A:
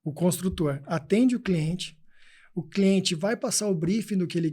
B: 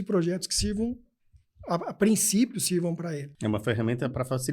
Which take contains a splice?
B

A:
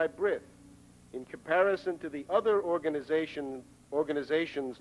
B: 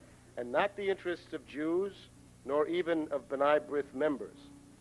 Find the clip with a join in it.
B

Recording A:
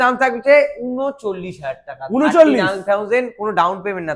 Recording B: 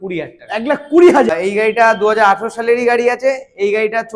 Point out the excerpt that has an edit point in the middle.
B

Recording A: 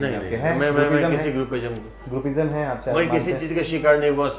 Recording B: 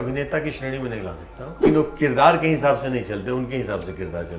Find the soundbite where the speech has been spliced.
B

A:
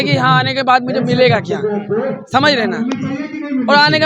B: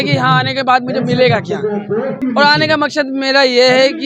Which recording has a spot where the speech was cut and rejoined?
B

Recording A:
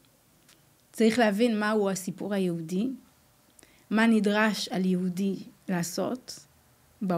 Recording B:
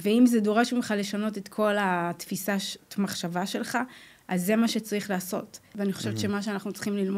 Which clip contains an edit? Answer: B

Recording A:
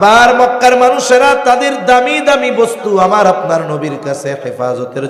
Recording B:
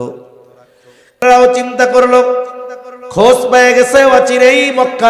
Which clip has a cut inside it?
B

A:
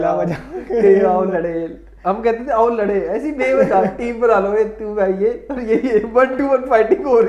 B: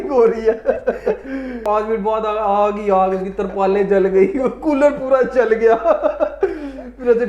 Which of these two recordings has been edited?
B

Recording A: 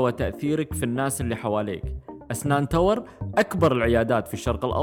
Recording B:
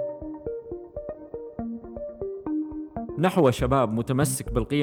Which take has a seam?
B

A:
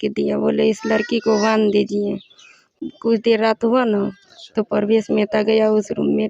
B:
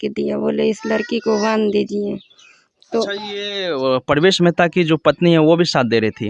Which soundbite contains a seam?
A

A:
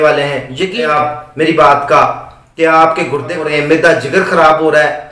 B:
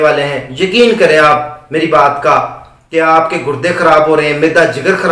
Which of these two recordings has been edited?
A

